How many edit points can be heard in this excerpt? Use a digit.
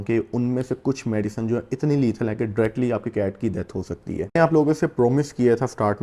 1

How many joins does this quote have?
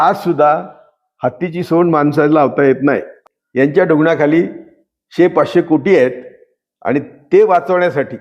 1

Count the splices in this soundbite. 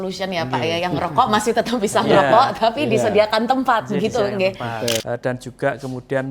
1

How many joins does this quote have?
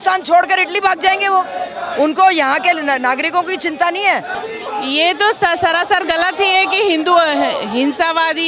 1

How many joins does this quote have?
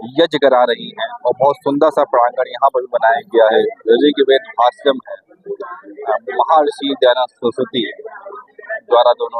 1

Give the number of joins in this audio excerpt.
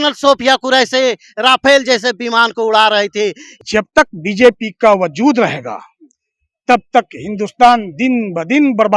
1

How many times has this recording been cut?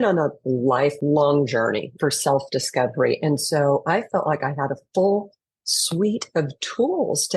2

